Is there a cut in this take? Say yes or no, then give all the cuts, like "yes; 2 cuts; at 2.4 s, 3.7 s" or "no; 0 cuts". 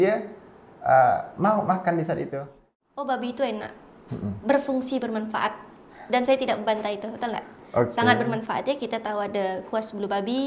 yes; 1 cut; at 2.7 s